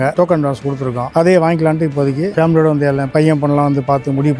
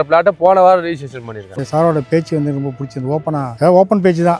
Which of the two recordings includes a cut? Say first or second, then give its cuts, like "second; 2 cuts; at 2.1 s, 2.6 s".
second; 1 cut; at 1.6 s